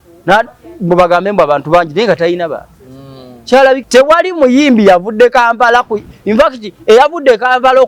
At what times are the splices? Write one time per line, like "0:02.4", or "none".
0:03.8